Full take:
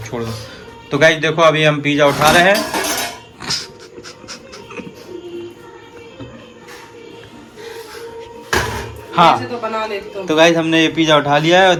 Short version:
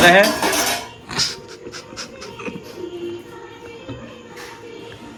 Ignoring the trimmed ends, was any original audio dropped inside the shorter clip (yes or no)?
no